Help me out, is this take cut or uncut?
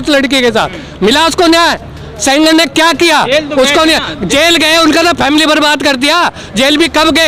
uncut